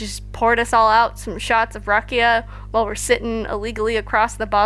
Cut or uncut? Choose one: uncut